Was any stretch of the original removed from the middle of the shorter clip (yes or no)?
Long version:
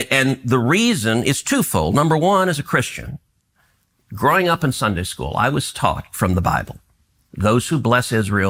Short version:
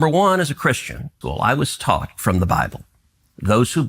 yes